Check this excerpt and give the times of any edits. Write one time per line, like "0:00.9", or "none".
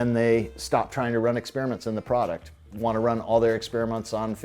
0:02.6